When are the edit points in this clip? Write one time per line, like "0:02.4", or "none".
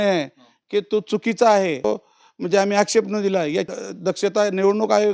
0:01.8
0:03.8